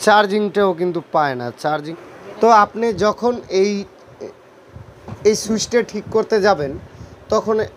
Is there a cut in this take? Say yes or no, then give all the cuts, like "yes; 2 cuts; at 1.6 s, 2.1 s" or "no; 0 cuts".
yes; 1 cut; at 1.7 s